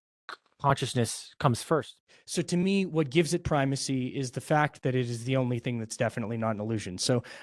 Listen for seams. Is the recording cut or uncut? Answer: cut